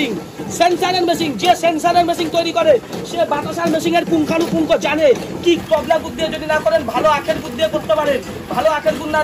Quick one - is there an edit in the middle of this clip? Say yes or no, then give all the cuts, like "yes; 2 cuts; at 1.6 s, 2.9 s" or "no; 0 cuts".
yes; 1 cut; at 5.6 s